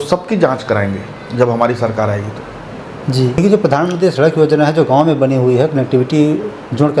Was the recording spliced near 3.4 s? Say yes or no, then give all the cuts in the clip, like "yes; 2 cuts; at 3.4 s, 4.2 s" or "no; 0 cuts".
yes; 1 cut; at 3.4 s